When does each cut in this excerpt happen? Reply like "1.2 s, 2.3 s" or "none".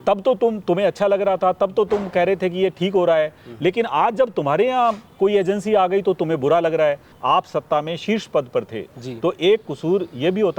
7.1 s